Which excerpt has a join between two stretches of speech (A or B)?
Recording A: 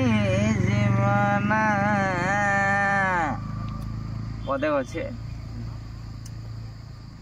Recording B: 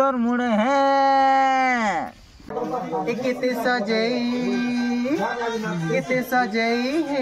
B